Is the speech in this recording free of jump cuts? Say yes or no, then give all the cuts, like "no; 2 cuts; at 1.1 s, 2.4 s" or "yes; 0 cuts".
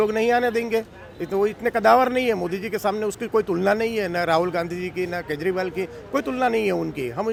yes; 0 cuts